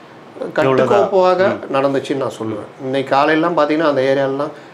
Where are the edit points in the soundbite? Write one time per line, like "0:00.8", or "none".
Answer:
none